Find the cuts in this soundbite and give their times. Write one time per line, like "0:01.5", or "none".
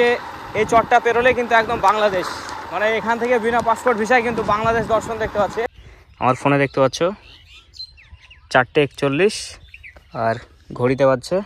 0:05.7